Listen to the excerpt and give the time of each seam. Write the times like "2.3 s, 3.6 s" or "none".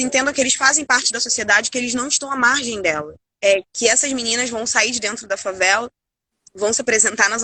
3.2 s